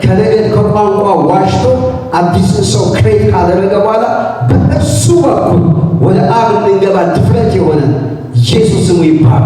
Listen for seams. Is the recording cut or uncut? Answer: uncut